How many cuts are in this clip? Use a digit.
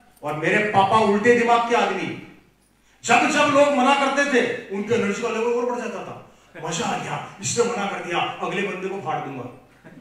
0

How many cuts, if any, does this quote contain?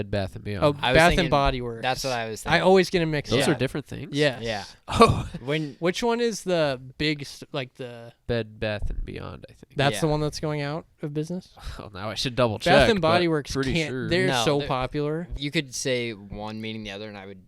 1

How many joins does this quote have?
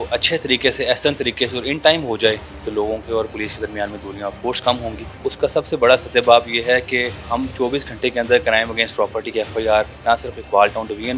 4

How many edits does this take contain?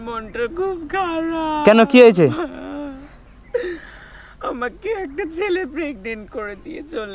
0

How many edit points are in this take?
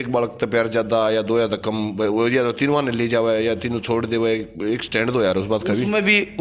0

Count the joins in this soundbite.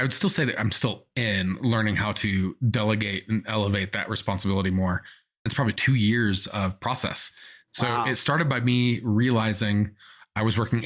1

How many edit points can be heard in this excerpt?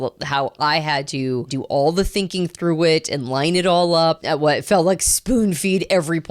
2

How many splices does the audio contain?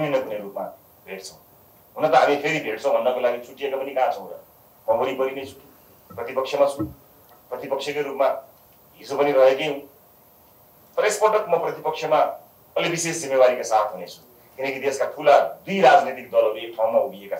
0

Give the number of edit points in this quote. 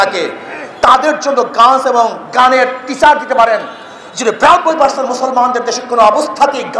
0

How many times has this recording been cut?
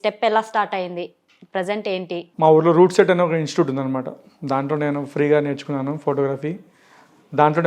1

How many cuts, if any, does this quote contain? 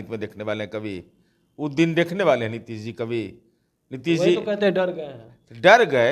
0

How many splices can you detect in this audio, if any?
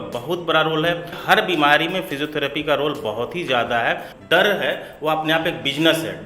2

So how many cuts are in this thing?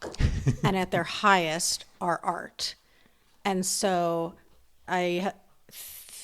1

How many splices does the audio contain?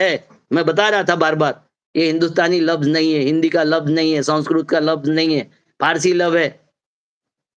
0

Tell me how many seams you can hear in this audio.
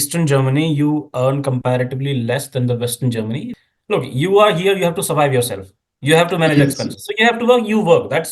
1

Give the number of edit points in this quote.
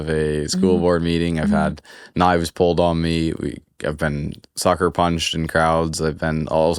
0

